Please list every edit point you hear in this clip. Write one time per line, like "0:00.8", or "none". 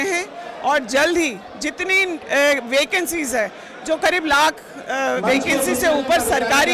none